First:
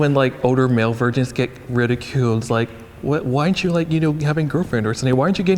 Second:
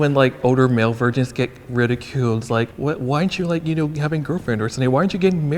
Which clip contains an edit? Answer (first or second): second